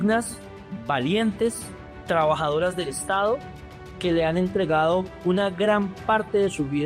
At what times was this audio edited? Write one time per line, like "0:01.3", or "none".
none